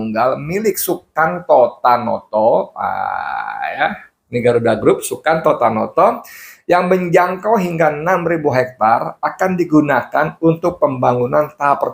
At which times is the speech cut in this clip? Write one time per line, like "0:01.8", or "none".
none